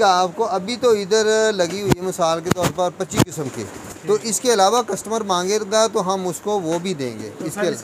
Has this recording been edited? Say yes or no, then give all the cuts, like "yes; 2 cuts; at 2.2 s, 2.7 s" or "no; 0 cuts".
no; 0 cuts